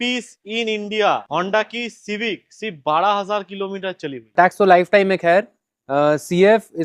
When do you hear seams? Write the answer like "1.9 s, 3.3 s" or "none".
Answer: 1.2 s, 4.3 s